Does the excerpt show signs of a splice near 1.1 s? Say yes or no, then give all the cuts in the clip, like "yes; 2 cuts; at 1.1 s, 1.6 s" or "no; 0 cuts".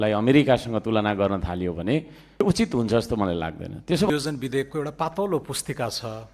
no; 2 cuts; at 2.4 s, 4.1 s